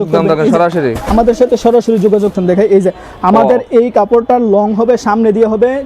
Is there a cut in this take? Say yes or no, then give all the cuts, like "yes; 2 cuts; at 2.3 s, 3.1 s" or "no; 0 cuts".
yes; 1 cut; at 2.3 s